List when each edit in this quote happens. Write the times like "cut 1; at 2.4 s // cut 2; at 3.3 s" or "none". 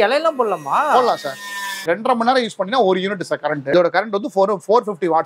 cut 1; at 1.9 s // cut 2; at 3.7 s

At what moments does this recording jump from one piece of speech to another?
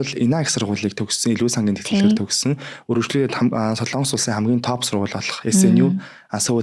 none

